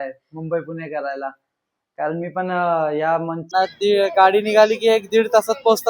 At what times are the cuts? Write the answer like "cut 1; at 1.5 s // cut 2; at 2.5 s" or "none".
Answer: cut 1; at 3.5 s